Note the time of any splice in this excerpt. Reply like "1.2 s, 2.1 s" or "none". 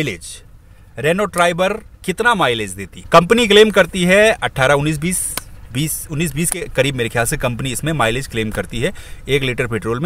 none

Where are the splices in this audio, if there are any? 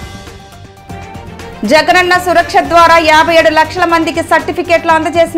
1.6 s

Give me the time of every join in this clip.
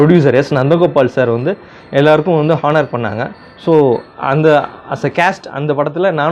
none

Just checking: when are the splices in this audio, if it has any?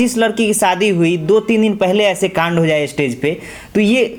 none

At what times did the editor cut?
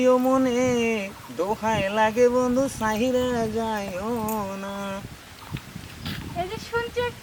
none

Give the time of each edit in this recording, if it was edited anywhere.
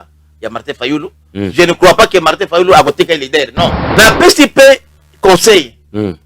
3.8 s

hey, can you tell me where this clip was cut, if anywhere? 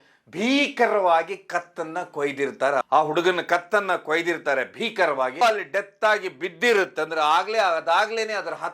2.9 s, 5.4 s

